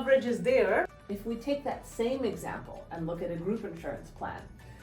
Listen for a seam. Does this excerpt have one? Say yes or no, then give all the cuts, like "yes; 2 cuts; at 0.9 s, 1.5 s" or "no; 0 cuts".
yes; 1 cut; at 1.0 s